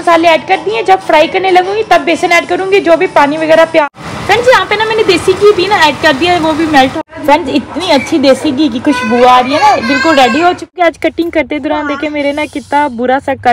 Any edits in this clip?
yes; 3 cuts; at 3.8 s, 6.9 s, 10.7 s

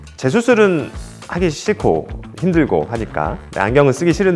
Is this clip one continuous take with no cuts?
yes; 0 cuts

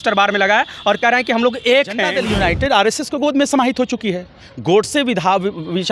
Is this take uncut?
no; 1 cut; at 2.2 s

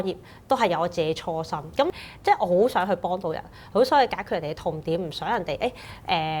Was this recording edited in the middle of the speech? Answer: yes; 1 cut; at 1.9 s

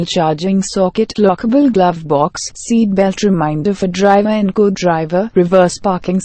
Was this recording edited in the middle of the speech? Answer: no; 0 cuts

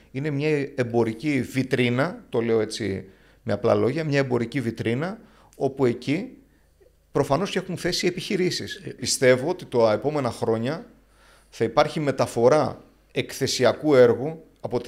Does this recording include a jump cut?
yes; 1 cut; at 9.0 s

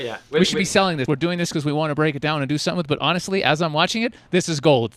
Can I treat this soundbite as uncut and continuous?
no; 1 cut; at 1.0 s

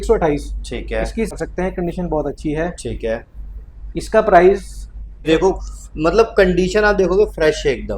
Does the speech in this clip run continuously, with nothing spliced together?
no; 2 cuts; at 1.3 s, 5.2 s

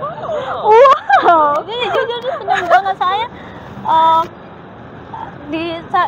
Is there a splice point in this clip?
no; 0 cuts

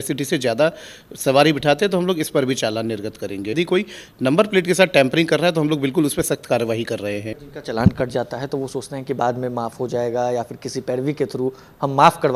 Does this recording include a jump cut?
yes; 2 cuts; at 3.5 s, 7.5 s

